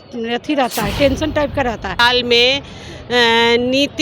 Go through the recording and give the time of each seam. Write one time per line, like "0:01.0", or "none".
0:02.0